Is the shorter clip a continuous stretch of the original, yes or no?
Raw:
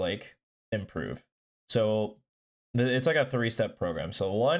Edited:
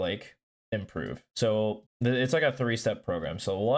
no